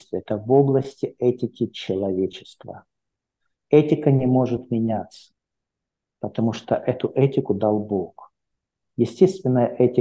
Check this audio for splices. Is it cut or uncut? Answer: uncut